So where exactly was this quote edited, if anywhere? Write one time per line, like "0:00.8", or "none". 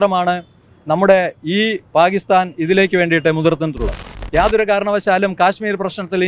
0:04.1

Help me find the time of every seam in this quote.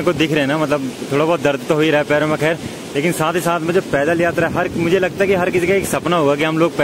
none

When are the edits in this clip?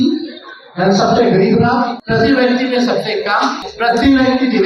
0:02.0
0:03.7

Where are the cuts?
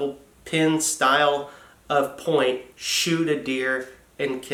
none

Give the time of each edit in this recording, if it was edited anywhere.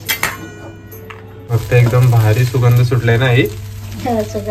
0:01.4

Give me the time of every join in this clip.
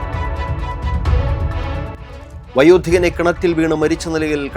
0:02.1

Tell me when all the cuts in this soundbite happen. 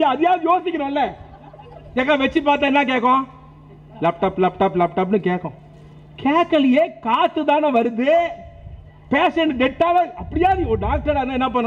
none

